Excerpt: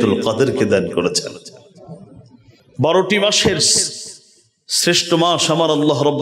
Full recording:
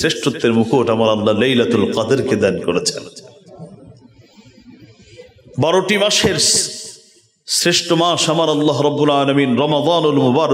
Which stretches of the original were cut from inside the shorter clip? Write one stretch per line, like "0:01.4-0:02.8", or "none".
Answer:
0:04.3-0:05.4